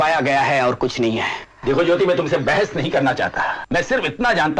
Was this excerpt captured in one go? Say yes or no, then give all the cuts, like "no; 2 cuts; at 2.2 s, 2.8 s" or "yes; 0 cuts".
yes; 0 cuts